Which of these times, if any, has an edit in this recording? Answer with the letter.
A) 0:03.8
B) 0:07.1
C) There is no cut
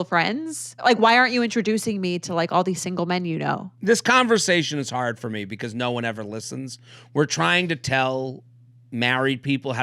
A